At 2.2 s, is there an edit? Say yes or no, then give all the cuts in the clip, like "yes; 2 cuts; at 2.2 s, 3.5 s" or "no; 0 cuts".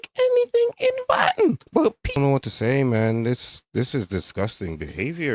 yes; 1 cut; at 2.2 s